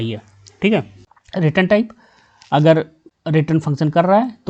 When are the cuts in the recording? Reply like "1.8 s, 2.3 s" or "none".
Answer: 1.0 s